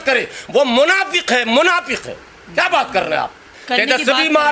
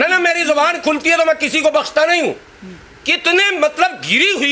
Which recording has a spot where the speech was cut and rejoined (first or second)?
first